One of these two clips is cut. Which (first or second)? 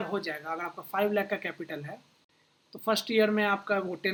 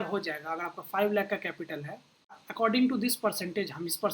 second